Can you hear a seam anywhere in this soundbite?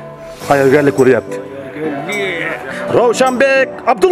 yes; 1 cut; at 2.9 s

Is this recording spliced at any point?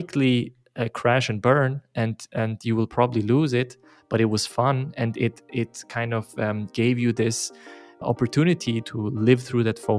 yes; 2 cuts; at 7.9 s, 8.8 s

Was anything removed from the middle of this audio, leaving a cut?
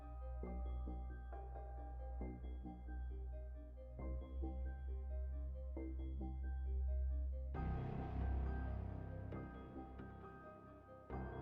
no; 0 cuts

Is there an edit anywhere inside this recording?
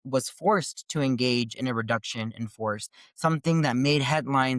no; 0 cuts

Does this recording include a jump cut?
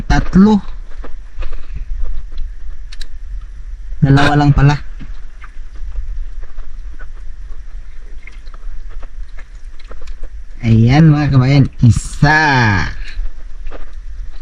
no; 0 cuts

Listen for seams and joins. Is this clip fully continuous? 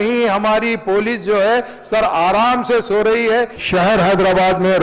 no; 1 cut; at 3.6 s

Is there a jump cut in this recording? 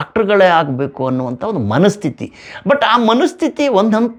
no; 0 cuts

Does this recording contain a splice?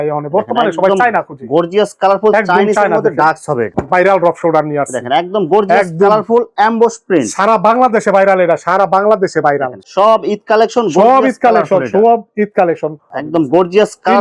yes; 3 cuts; at 3.7 s, 9.8 s, 13.1 s

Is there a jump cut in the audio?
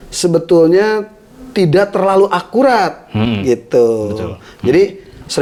no; 0 cuts

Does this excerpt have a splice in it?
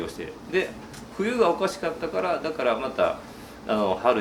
no; 0 cuts

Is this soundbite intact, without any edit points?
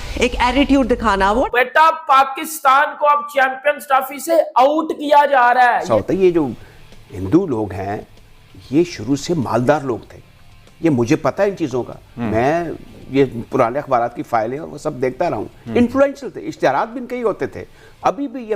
no; 2 cuts; at 1.5 s, 5.9 s

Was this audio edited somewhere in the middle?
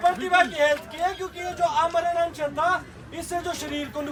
no; 0 cuts

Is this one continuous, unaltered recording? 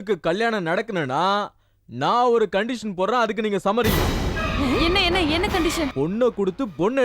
no; 1 cut; at 5.9 s

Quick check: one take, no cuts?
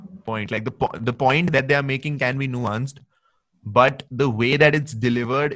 no; 1 cut; at 1.5 s

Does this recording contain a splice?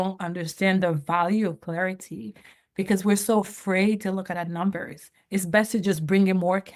no; 0 cuts

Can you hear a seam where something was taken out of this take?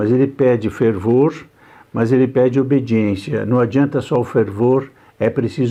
no; 0 cuts

